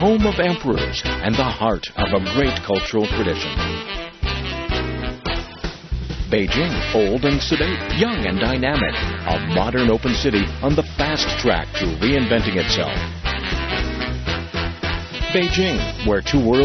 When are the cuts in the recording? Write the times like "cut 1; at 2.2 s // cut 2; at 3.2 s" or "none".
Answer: none